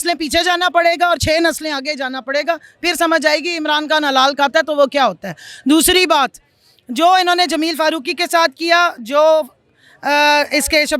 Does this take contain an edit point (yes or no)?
no